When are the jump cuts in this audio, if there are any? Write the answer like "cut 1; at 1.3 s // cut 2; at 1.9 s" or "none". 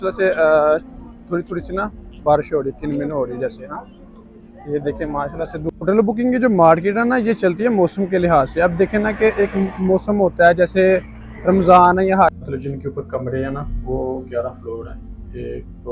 cut 1; at 5.8 s // cut 2; at 12.4 s